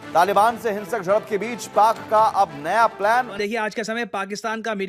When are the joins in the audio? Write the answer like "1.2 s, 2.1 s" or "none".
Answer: 3.5 s